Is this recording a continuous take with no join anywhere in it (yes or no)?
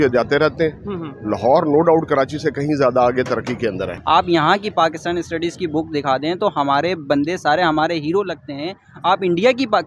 no